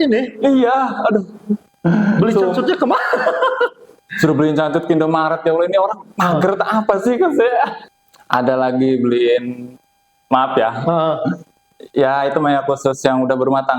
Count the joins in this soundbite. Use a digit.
1